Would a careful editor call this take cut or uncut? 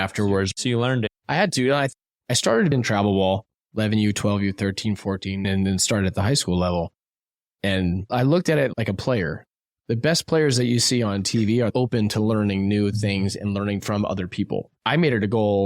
cut